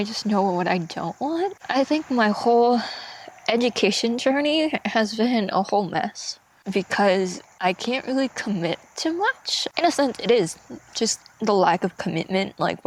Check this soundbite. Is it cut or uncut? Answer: uncut